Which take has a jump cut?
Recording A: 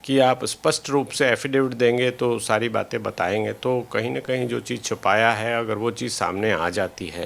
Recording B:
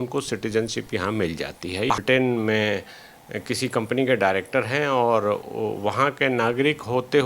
B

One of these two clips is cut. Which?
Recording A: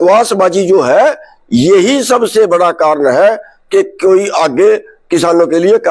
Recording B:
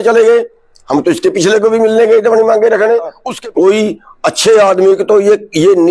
B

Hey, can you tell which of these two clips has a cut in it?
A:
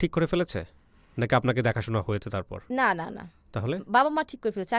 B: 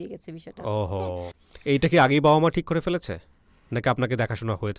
B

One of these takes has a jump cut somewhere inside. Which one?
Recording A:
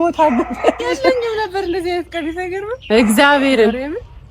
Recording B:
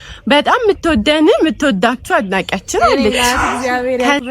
B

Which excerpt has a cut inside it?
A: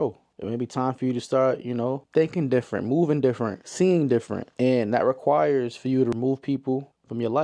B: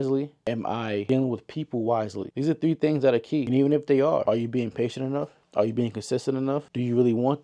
B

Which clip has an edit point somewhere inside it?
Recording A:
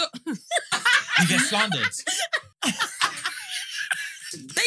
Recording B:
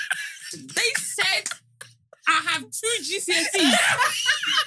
A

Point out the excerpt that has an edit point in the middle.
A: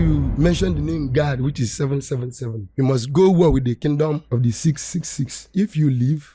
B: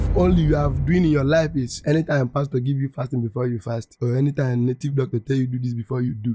A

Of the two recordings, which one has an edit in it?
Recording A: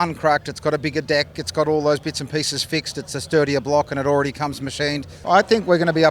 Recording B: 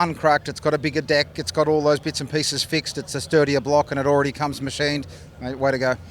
A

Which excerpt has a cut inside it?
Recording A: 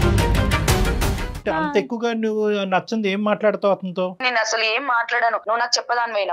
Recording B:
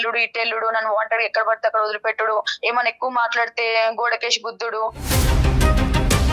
A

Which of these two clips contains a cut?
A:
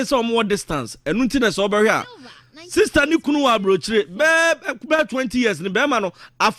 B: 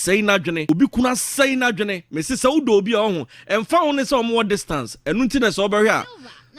B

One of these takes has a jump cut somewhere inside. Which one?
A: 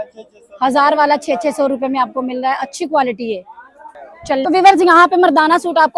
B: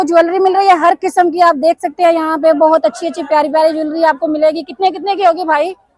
A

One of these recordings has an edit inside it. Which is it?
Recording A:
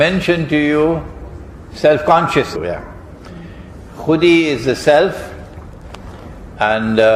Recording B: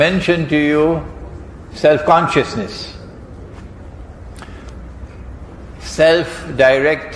B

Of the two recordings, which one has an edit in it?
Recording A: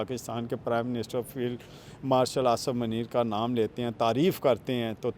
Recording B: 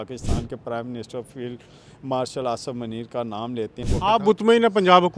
B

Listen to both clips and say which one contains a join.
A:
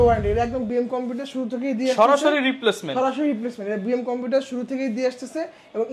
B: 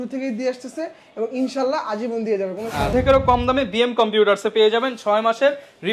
B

